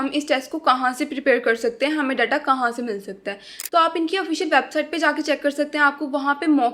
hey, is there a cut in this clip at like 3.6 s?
no; 0 cuts

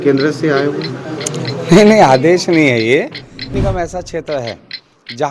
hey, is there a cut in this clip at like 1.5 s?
no; 1 cut; at 3.6 s

